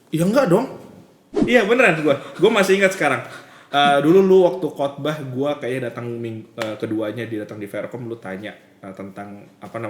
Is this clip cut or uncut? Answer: cut